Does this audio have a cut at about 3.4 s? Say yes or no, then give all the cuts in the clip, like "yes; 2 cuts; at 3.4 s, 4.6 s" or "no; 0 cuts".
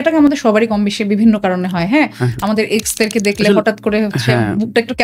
no; 0 cuts